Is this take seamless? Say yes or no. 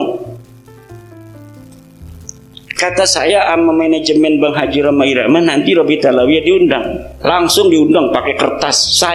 no